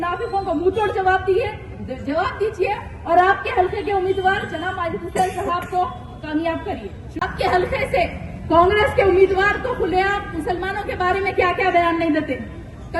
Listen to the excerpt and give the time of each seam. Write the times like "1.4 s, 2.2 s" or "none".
7.2 s